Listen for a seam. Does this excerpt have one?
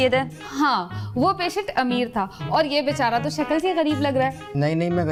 no; 0 cuts

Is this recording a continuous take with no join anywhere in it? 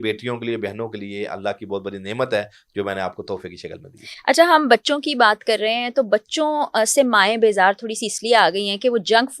yes; 0 cuts

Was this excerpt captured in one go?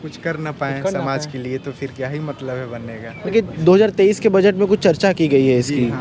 no; 1 cut; at 3.3 s

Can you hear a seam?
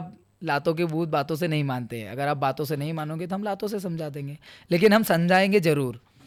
no; 0 cuts

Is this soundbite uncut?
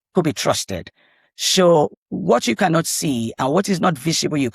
no; 1 cut; at 1.9 s

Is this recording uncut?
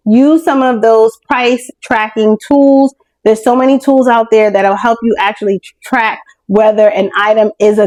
yes; 0 cuts

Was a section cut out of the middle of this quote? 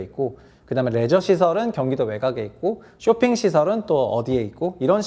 no; 0 cuts

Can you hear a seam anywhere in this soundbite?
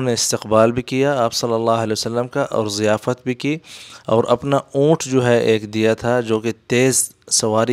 no; 0 cuts

